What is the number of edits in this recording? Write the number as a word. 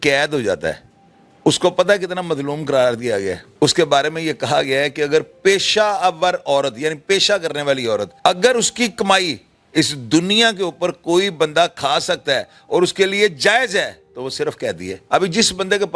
three